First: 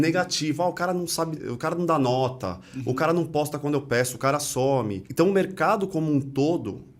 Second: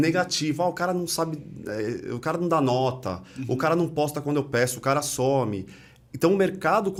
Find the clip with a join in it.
first; 2 cuts; at 1.4 s, 5.0 s

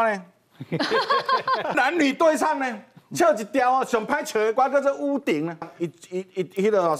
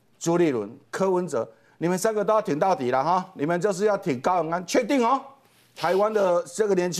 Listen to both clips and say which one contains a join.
first; 2 cuts; at 1.7 s, 5.7 s

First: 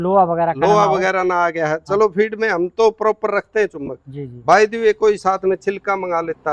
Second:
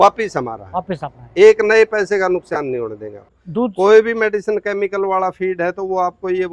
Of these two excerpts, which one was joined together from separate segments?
second; 1 cut; at 3.3 s

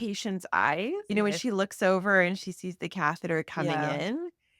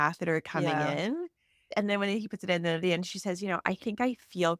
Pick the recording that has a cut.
first; 1 cut; at 1.0 s

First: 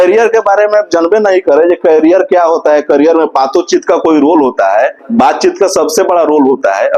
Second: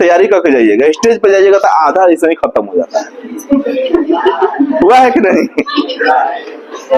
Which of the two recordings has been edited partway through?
first; 1 cut; at 5.0 s

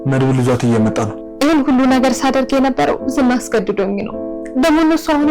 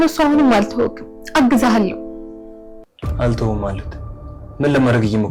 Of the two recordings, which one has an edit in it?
first; 1 cut; at 1.2 s

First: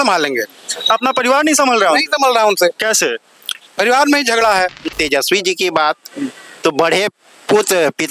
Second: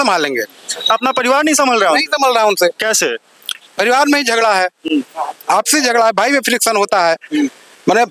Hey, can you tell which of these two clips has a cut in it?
first; 1 cut; at 4.9 s

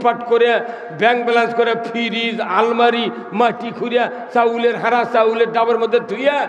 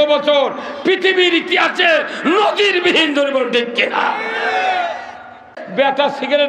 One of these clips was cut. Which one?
second; 1 cut; at 5.6 s

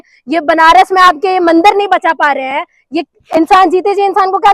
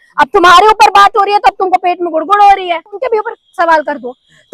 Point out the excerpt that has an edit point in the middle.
second; 1 cut; at 3.0 s

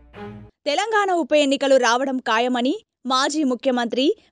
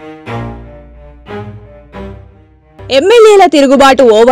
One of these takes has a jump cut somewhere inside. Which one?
second; 2 cuts; at 1.5 s, 2.2 s

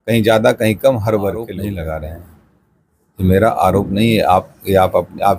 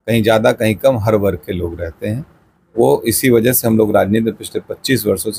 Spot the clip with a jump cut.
first; 1 cut; at 1.5 s

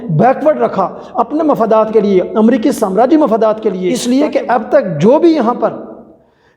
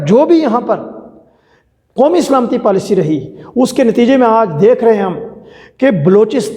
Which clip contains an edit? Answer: first; 1 cut; at 4.0 s

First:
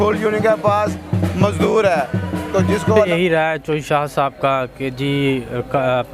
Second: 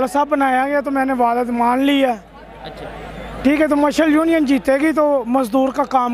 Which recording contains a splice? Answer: first; 1 cut; at 2.9 s

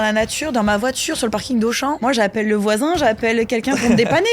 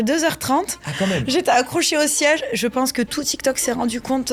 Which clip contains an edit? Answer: first; 1 cut; at 2.0 s

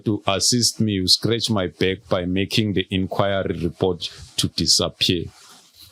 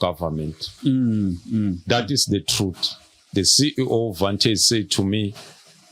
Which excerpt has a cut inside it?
second; 1 cut; at 3.3 s

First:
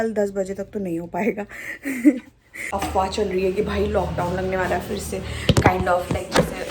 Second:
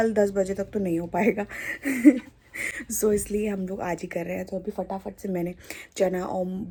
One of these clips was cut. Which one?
first; 1 cut; at 2.7 s

